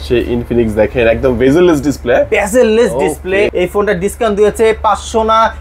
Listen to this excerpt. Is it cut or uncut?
cut